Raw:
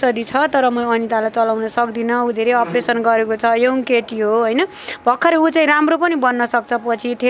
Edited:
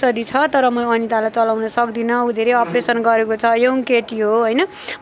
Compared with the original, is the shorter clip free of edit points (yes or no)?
yes